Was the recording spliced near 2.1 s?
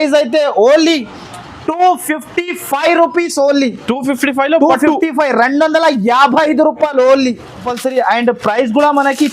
no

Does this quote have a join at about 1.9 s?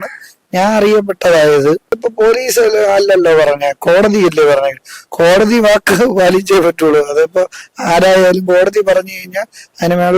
yes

